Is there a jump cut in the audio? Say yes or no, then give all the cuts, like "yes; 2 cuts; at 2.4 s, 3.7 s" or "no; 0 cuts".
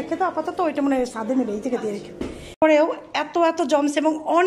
yes; 1 cut; at 2.6 s